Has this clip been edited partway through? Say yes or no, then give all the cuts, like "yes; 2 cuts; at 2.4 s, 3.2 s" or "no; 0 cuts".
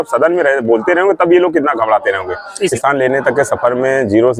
yes; 1 cut; at 2.7 s